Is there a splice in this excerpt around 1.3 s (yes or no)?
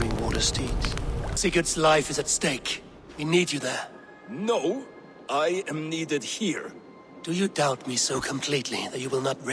yes